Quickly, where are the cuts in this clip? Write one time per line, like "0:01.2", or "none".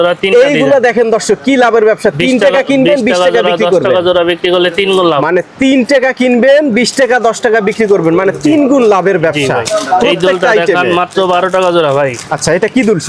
none